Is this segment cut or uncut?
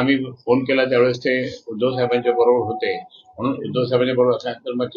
uncut